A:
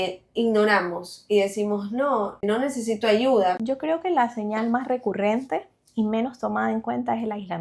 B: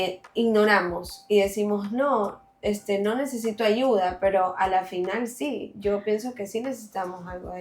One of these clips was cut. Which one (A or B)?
A